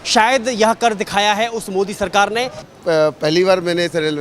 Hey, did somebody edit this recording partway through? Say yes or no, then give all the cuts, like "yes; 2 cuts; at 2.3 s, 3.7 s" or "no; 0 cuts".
yes; 1 cut; at 2.6 s